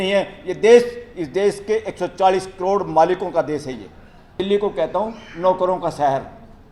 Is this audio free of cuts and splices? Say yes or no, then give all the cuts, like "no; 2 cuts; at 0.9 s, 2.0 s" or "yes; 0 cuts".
no; 1 cut; at 4.4 s